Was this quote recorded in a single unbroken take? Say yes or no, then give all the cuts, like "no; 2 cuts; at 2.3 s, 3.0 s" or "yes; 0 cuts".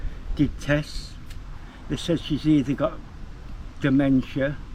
yes; 0 cuts